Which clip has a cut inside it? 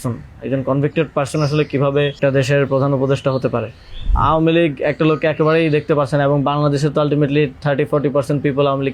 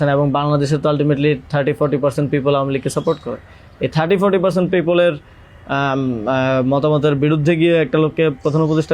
first; 2 cuts; at 2.2 s, 4.1 s

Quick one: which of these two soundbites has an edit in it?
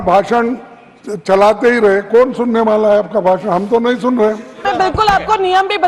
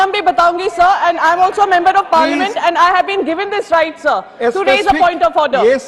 first; 1 cut; at 4.6 s

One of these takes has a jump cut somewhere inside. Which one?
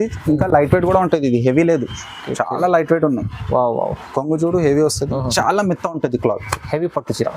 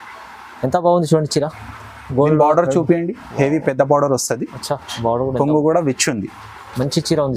first; 1 cut; at 5.2 s

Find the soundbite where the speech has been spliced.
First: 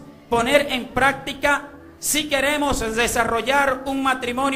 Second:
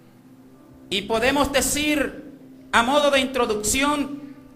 second; 1 cut; at 3.5 s

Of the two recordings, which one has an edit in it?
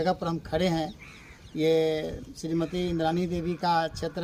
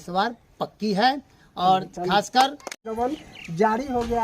second; 1 cut; at 2.8 s

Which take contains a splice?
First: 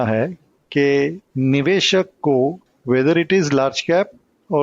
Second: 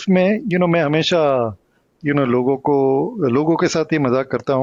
first; 1 cut; at 2.7 s

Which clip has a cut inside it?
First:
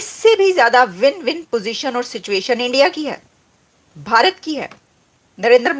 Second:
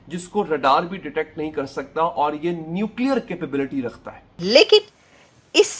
second; 1 cut; at 4.3 s

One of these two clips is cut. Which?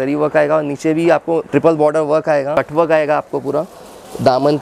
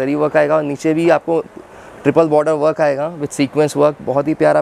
first; 2 cuts; at 1.5 s, 2.5 s

